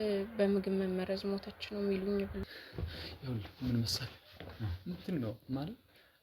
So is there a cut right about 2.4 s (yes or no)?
yes